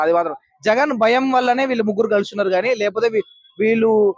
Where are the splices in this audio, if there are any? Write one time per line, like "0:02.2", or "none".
none